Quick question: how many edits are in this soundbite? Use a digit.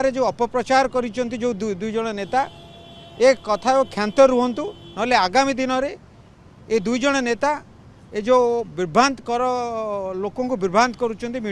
0